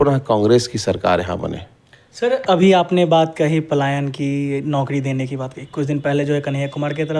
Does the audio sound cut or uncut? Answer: uncut